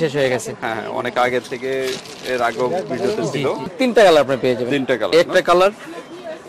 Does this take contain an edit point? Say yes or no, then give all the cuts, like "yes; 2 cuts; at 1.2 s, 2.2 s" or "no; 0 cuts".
yes; 1 cut; at 3.7 s